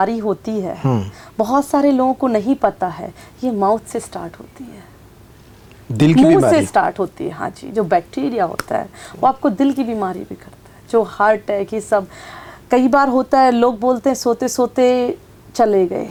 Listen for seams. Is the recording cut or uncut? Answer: uncut